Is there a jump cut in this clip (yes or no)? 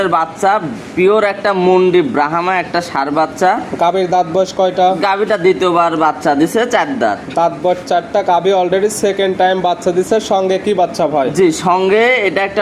no